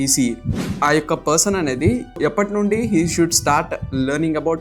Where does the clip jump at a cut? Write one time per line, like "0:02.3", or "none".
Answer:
0:02.2